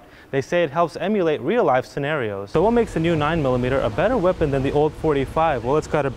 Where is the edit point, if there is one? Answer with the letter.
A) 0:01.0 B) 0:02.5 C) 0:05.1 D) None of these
B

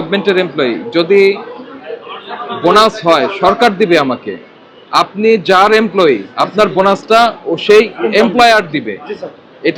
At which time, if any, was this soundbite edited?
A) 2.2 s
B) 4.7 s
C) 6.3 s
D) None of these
D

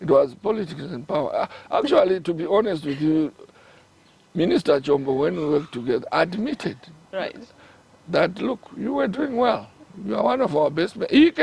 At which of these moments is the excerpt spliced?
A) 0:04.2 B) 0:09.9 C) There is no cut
C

